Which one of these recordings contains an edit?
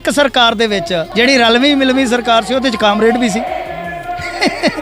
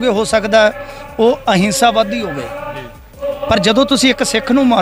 first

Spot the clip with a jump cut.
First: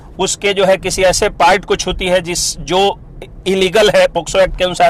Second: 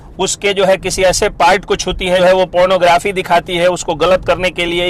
second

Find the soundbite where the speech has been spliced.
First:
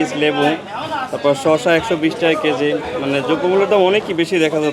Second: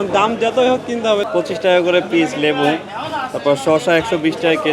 second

